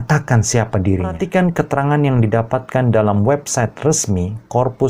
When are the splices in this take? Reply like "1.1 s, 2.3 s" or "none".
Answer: 1.2 s